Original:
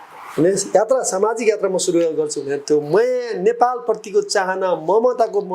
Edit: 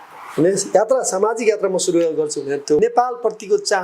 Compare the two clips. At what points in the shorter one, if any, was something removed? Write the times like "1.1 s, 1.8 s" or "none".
2.8 s